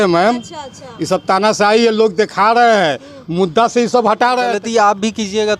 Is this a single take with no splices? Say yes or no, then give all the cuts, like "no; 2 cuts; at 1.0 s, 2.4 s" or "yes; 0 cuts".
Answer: no; 1 cut; at 4.6 s